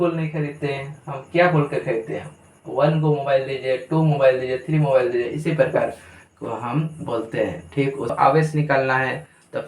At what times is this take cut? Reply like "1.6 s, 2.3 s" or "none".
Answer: 8.1 s